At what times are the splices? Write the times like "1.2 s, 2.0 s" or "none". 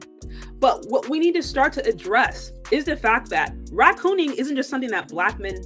none